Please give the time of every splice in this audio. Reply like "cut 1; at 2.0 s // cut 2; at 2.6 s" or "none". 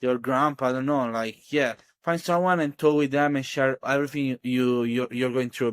cut 1; at 4.4 s

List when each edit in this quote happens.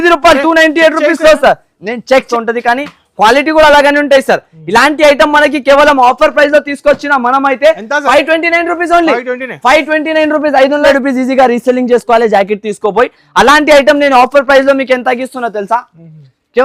cut 1; at 2.3 s // cut 2; at 10.8 s

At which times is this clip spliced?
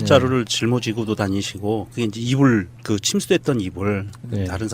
none

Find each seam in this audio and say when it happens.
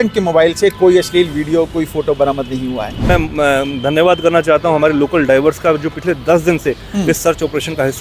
cut 1; at 3.0 s

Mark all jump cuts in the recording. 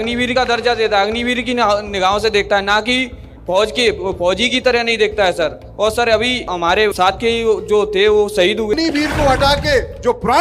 cut 1; at 8.7 s

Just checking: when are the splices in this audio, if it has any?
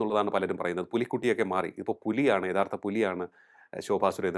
none

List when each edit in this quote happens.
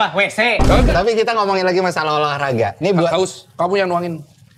cut 1; at 0.9 s

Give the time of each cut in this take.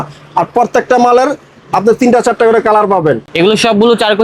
cut 1; at 3.3 s

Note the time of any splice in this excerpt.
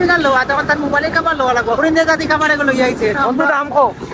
cut 1; at 1.8 s // cut 2; at 3.2 s

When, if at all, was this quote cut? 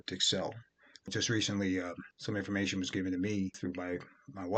cut 1; at 1.1 s

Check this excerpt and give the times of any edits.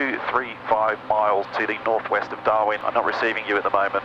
cut 1; at 1.5 s // cut 2; at 2.8 s

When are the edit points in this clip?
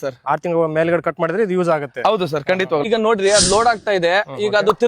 cut 1; at 2.9 s

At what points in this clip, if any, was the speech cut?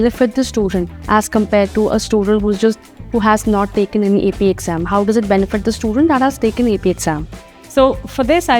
none

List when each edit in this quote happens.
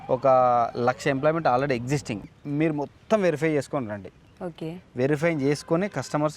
cut 1; at 2.2 s

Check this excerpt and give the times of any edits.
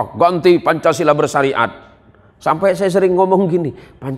none

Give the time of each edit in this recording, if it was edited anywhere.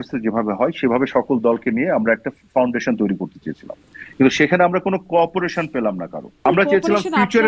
cut 1; at 6.4 s

